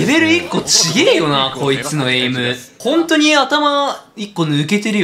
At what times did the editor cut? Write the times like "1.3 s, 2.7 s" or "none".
2.7 s